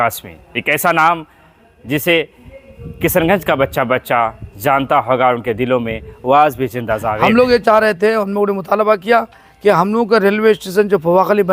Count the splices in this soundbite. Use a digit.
1